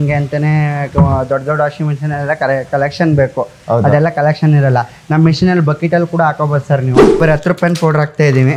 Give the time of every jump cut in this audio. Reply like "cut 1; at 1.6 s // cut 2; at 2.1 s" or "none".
cut 1; at 7.2 s